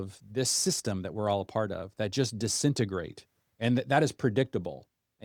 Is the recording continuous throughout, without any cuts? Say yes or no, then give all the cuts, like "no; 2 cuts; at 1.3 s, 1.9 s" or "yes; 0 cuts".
yes; 0 cuts